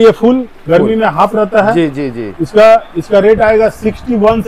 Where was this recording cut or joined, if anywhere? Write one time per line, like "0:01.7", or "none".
none